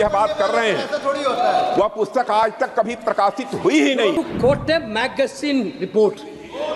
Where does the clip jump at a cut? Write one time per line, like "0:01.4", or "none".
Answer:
0:04.1